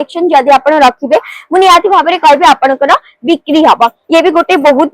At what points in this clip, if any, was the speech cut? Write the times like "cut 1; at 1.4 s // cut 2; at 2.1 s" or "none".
cut 1; at 4.0 s